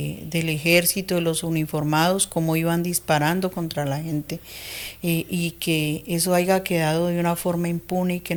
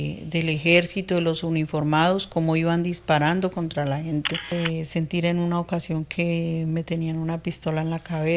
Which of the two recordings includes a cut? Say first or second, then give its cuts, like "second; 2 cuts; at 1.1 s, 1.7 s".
second; 1 cut; at 4.5 s